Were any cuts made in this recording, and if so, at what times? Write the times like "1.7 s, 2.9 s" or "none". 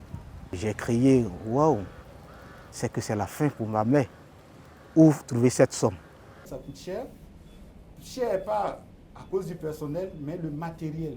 6.5 s